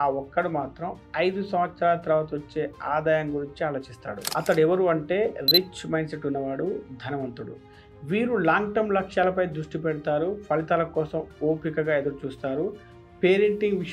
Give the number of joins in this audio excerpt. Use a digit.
0